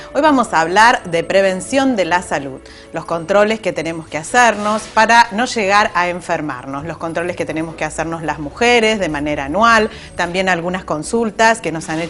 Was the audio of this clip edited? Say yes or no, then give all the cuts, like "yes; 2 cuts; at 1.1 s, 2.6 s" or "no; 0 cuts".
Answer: no; 0 cuts